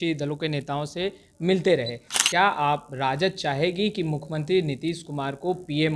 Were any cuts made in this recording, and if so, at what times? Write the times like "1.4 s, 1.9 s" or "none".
2.0 s